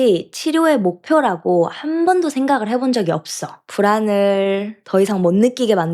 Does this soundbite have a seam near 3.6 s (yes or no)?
yes